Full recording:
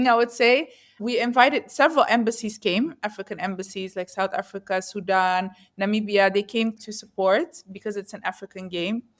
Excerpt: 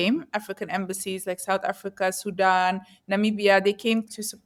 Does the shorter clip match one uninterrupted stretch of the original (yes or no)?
yes